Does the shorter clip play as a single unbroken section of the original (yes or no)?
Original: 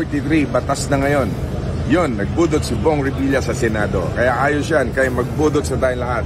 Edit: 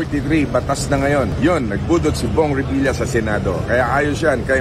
no